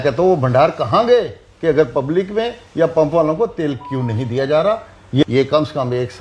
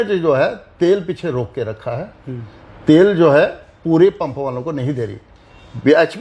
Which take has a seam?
first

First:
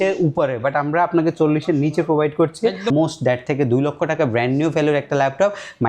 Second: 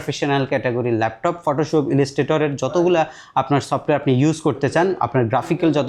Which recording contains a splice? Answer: first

